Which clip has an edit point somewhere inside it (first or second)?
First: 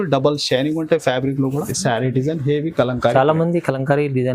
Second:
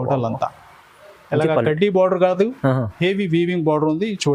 first